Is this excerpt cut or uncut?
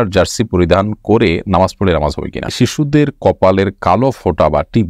cut